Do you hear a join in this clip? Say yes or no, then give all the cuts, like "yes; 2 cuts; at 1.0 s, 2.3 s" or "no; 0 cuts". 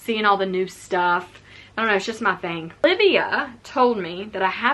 yes; 1 cut; at 2.8 s